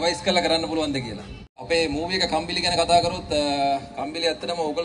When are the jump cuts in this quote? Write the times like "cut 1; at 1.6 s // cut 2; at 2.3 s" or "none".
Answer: cut 1; at 1.6 s